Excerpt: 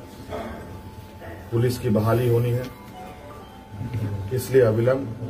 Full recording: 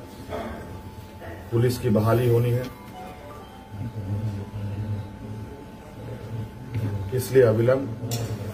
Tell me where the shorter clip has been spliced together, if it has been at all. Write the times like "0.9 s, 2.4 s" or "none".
3.9 s